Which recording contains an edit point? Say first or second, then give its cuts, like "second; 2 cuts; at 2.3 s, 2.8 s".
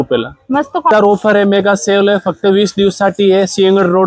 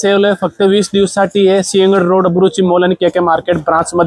first; 1 cut; at 0.9 s